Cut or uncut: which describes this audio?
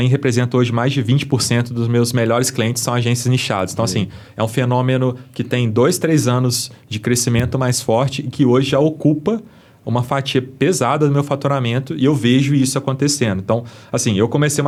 uncut